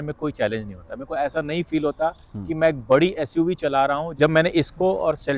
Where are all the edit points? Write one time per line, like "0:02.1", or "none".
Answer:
0:04.1